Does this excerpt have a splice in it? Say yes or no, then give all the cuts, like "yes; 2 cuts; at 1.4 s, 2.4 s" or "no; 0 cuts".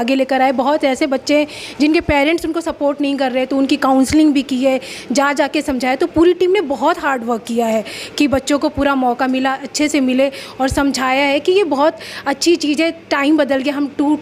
no; 0 cuts